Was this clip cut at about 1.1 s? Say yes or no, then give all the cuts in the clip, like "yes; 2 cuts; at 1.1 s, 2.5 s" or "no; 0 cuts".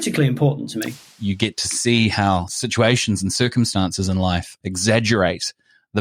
yes; 3 cuts; at 1.1 s, 2.5 s, 4.5 s